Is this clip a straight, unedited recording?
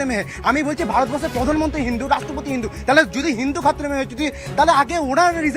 yes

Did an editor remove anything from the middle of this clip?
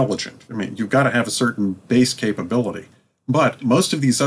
no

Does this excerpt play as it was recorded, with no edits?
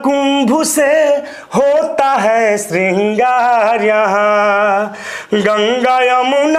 yes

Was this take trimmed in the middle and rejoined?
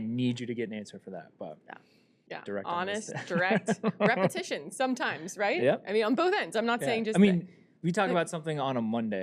yes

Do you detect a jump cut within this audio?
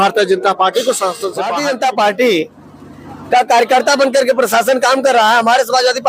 yes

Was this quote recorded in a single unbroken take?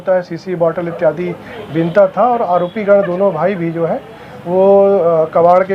yes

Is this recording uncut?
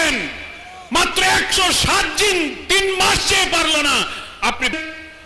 yes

